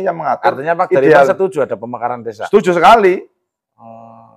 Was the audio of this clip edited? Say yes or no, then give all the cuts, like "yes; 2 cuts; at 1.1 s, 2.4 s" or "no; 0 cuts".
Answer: no; 0 cuts